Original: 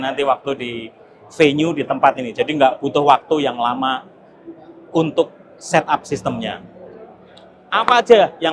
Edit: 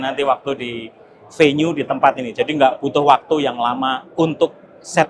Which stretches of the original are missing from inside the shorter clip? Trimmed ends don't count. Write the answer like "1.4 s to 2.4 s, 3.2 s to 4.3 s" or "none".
4.0 s to 4.8 s